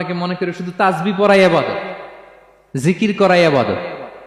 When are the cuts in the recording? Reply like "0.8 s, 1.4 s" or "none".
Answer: none